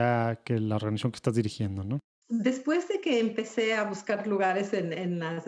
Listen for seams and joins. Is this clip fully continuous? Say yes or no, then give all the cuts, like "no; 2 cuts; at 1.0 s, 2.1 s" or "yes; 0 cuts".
no; 1 cut; at 2.1 s